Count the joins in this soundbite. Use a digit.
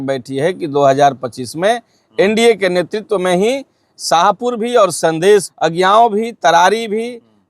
1